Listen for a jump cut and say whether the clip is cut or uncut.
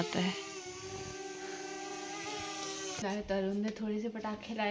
cut